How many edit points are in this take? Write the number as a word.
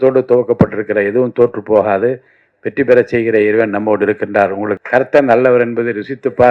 one